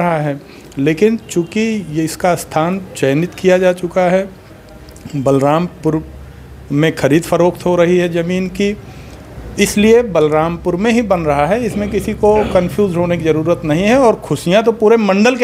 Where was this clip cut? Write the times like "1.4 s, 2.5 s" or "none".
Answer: none